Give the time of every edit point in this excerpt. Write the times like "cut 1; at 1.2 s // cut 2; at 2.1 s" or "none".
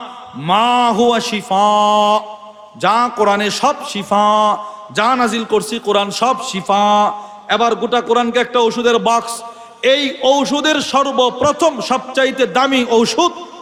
none